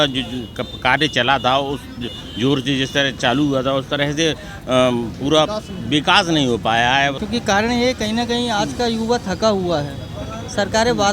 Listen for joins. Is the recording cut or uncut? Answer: cut